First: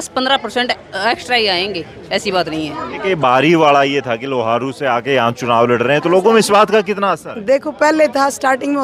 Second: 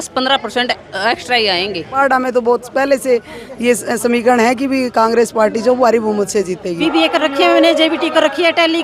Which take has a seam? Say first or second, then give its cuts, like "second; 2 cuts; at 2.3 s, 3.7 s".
second; 2 cuts; at 2.0 s, 6.8 s